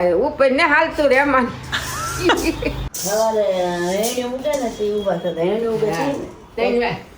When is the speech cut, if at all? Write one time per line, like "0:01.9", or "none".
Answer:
0:02.9